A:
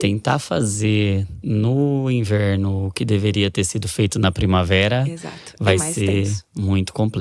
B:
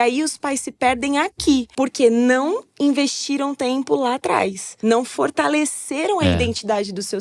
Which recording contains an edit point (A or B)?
B